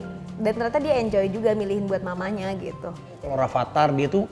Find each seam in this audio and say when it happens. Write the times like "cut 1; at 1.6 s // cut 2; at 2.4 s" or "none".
cut 1; at 3.3 s